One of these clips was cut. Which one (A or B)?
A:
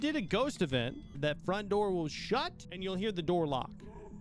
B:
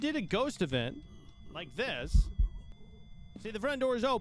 A